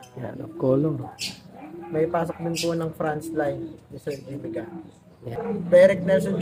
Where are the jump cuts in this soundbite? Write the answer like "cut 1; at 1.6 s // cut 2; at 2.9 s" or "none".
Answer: cut 1; at 5.3 s